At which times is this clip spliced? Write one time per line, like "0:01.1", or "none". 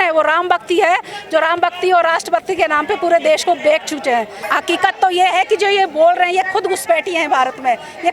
0:04.4